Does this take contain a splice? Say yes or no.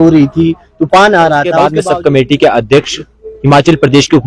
yes